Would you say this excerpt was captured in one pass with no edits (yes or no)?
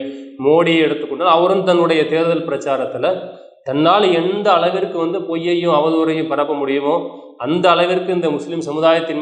yes